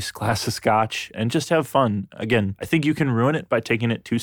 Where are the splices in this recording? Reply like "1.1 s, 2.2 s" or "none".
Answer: 1.1 s, 2.6 s

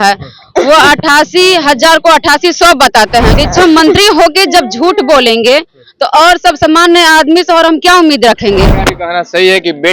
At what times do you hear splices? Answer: 3.3 s, 8.7 s

